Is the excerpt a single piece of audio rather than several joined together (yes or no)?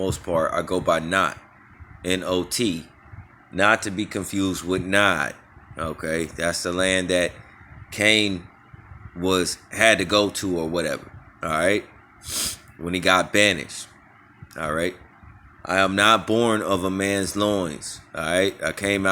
yes